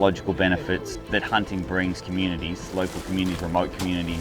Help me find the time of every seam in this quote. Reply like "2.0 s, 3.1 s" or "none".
0.9 s